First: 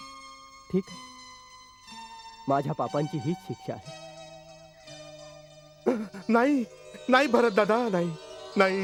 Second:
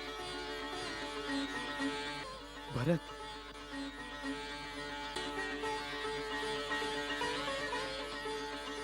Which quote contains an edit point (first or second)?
second